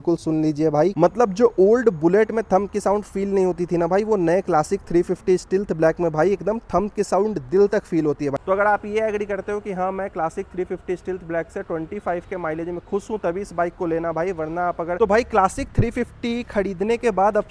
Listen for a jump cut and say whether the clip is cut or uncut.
cut